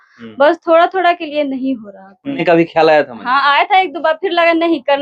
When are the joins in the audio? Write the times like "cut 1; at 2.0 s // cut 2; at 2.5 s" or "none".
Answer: cut 1; at 2.4 s